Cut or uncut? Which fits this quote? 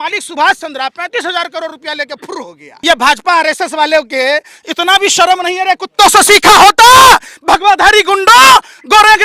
cut